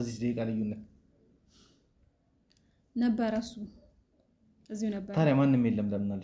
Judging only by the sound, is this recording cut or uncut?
uncut